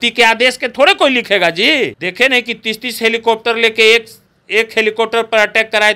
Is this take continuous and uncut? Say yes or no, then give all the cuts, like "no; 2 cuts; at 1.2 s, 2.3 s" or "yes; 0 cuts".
no; 1 cut; at 2.0 s